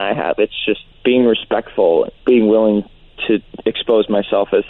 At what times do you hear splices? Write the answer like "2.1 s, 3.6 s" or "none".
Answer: 0.9 s, 2.1 s, 3.5 s